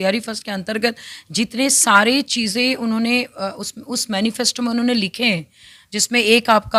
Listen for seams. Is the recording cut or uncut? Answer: uncut